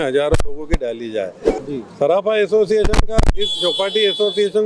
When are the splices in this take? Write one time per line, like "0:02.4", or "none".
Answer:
0:01.6